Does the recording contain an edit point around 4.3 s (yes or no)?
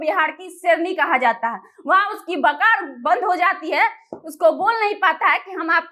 no